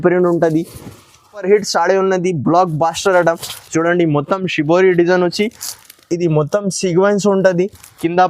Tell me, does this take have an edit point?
yes; 1 cut; at 1.3 s

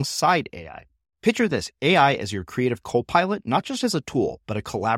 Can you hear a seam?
no; 0 cuts

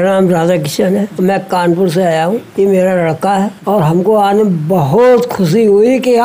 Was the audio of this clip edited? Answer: yes; 3 cuts; at 1.1 s, 2.5 s, 3.6 s

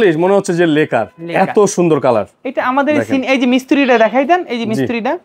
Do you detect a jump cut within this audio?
no; 0 cuts

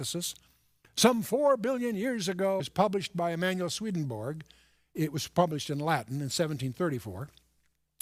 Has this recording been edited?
no; 0 cuts

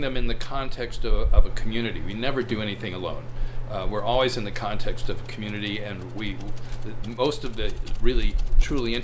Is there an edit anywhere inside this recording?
no; 0 cuts

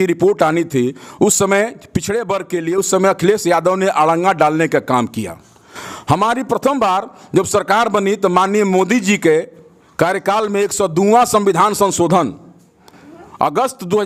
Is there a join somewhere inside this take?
no; 0 cuts

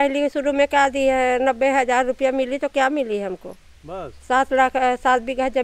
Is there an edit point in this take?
no; 0 cuts

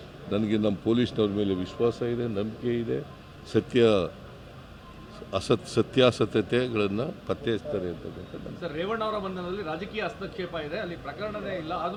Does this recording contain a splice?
no; 0 cuts

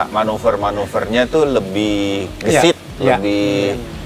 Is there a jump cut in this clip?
no; 0 cuts

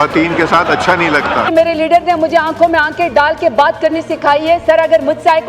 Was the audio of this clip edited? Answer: yes; 1 cut; at 1.5 s

